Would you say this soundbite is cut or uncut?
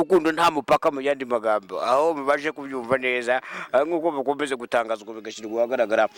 uncut